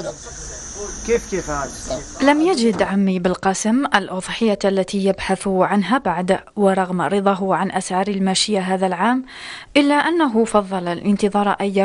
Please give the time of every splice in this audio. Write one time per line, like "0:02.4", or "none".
none